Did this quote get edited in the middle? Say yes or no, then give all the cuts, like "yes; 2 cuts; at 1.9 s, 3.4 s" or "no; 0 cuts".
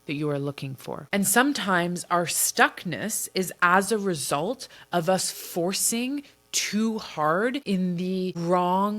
yes; 2 cuts; at 1.0 s, 7.7 s